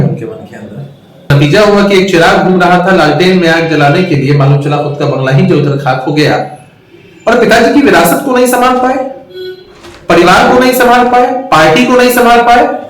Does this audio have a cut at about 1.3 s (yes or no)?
yes